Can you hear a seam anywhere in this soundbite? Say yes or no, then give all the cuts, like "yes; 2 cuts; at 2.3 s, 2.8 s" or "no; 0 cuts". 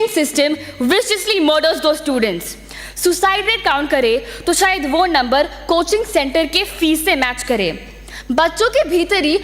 no; 0 cuts